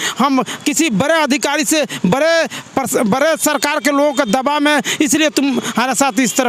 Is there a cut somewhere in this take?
no; 0 cuts

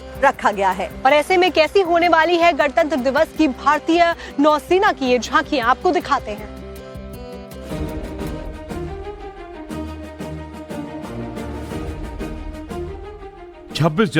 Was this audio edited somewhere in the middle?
no; 0 cuts

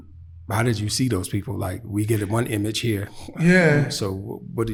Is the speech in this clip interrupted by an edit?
no; 0 cuts

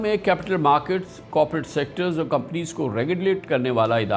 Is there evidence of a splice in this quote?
no; 0 cuts

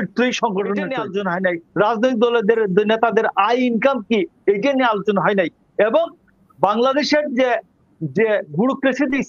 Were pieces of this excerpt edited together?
yes; 1 cut; at 1.0 s

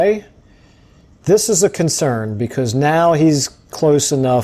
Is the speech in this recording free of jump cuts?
yes; 0 cuts

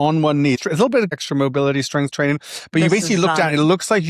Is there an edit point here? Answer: yes; 1 cut; at 1.0 s

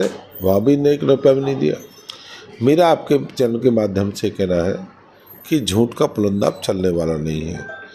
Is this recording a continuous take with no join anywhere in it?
yes; 0 cuts

